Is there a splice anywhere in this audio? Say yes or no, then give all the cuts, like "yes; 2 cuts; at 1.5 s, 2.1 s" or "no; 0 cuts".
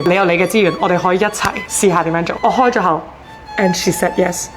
yes; 2 cuts; at 1.6 s, 2.3 s